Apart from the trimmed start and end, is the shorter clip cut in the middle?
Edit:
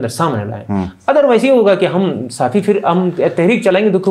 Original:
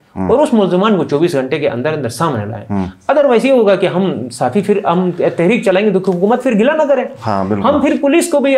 no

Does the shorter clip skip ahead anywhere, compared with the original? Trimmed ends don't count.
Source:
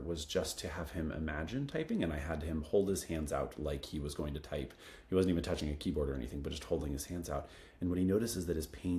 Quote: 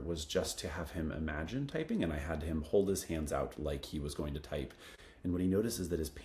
yes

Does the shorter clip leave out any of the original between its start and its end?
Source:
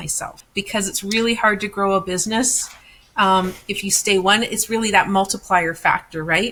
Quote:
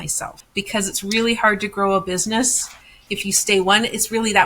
yes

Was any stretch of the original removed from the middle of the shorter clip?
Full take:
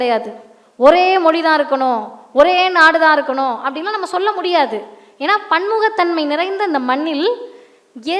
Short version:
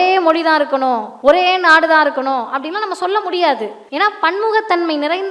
yes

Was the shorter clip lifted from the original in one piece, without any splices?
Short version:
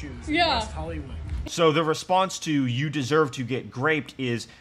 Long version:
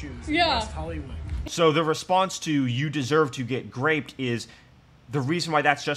yes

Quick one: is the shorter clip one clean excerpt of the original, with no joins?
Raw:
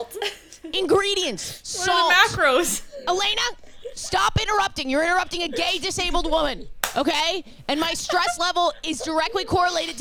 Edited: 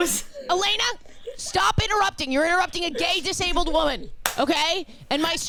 yes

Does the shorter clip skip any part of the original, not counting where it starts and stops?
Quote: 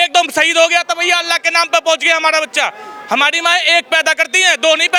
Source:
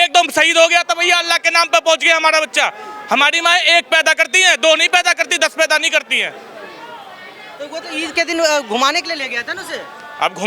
no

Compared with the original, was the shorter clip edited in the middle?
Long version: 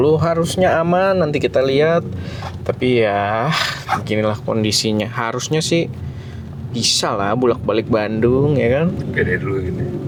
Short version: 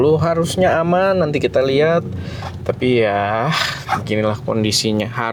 no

